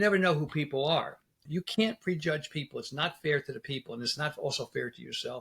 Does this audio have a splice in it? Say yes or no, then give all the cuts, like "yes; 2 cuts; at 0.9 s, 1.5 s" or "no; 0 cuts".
yes; 1 cut; at 1.4 s